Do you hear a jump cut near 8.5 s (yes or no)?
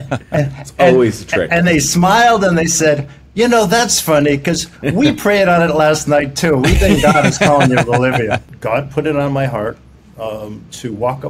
yes